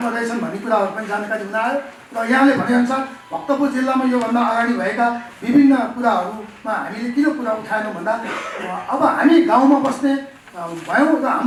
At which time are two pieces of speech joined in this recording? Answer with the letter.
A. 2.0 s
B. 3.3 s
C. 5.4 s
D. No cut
D